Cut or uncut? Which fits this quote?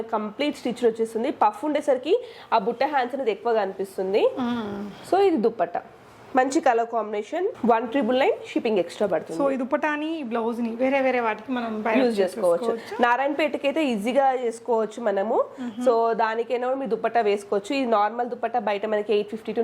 uncut